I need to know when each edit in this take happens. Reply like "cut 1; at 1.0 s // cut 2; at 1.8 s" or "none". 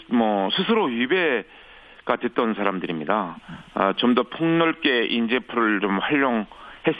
cut 1; at 4.0 s